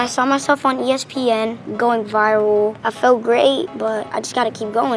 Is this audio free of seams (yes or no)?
no